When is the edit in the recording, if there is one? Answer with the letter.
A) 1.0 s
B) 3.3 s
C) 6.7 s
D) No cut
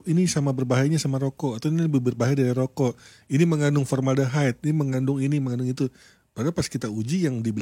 D